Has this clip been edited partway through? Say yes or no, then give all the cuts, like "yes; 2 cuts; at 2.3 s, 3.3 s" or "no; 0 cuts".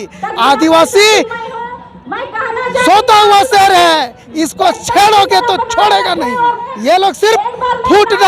yes; 1 cut; at 6.6 s